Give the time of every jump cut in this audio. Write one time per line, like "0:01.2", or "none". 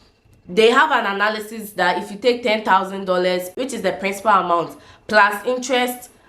0:03.5